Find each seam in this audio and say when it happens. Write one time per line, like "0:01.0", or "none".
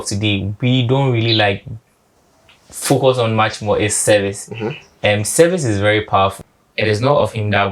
0:06.4